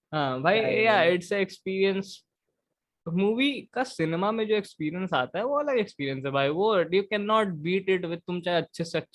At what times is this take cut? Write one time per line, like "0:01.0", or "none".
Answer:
none